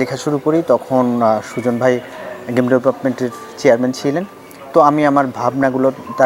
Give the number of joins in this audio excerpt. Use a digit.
0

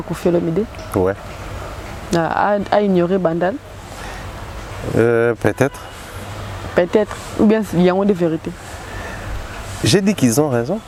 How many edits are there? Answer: 0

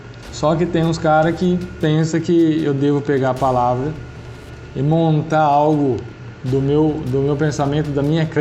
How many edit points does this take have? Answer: 0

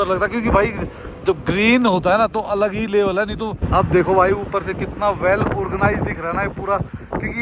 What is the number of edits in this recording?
1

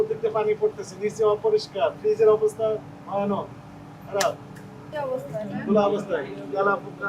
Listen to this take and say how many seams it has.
1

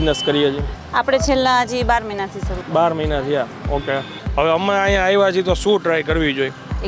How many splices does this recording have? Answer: 1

